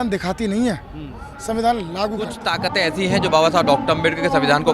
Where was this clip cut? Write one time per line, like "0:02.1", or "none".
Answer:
0:02.5